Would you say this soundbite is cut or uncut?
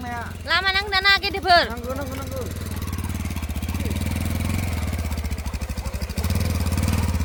uncut